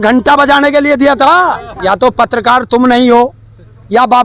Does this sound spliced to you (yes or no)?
yes